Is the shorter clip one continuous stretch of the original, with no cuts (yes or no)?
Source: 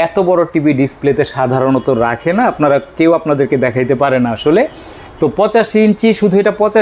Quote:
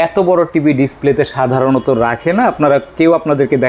yes